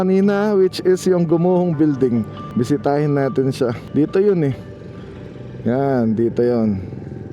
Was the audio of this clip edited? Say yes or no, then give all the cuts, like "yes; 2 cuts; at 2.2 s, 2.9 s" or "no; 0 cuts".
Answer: yes; 2 cuts; at 2.4 s, 3.8 s